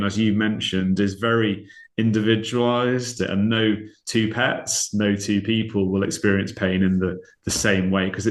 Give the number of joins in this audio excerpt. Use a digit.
1